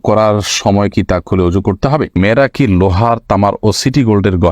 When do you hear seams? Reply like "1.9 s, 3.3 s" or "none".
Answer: 2.1 s